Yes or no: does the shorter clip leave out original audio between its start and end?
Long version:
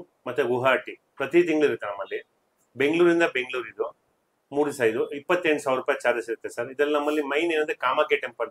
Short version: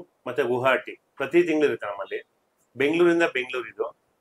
no